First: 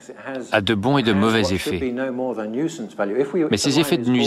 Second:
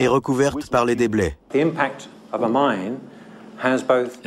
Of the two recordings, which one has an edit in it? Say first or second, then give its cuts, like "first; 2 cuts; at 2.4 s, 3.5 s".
second; 1 cut; at 1.4 s